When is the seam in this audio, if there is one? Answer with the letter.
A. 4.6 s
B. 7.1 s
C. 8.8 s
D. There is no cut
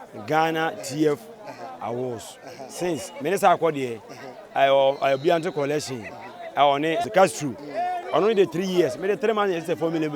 B